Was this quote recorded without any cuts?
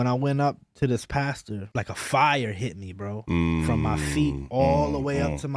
no; 1 cut; at 1.6 s

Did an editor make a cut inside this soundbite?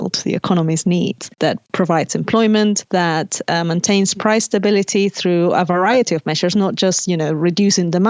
yes; 2 cuts; at 1.3 s, 2.8 s

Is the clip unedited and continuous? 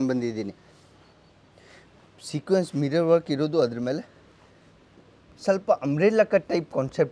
yes; 0 cuts

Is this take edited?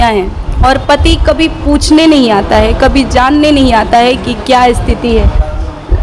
no; 0 cuts

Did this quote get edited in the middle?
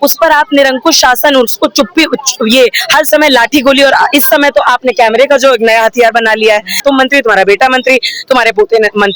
yes; 1 cut; at 6.8 s

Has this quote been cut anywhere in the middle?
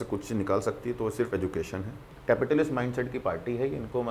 yes; 1 cut; at 2.1 s

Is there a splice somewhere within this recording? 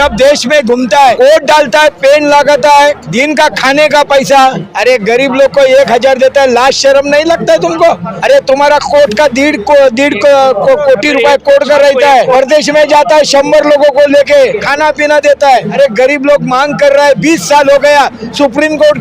yes; 7 cuts; at 1.1 s, 3.0 s, 4.7 s, 8.1 s, 12.3 s, 14.7 s, 15.7 s

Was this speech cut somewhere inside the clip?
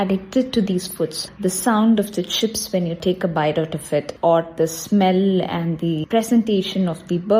yes; 4 cuts; at 1.3 s, 3.0 s, 4.1 s, 6.0 s

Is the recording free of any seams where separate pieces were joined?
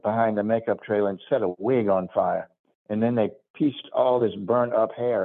yes; 0 cuts

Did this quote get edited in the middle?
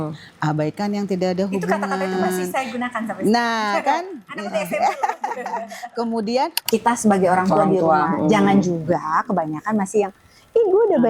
yes; 1 cut; at 6.6 s

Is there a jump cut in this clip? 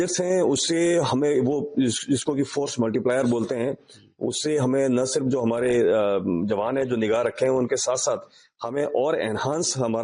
no; 0 cuts

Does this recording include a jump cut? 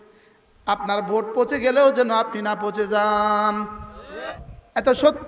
yes; 1 cut; at 4.2 s

